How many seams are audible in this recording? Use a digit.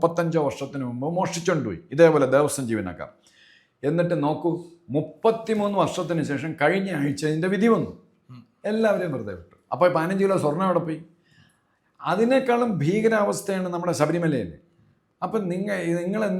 0